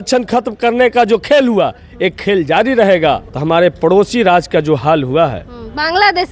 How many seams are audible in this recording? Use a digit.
1